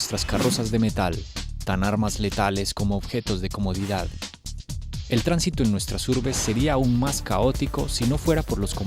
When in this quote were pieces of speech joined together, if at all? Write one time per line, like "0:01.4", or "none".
none